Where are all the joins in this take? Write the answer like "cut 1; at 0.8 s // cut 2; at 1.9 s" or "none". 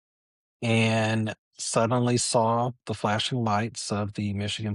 none